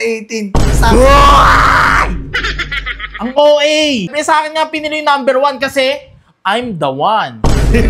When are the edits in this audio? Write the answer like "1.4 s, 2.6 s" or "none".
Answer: 4.1 s